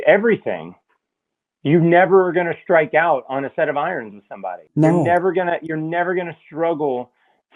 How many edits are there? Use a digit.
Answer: 1